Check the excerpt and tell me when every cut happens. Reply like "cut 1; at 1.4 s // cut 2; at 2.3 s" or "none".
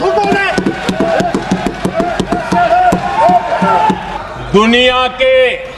cut 1; at 4.1 s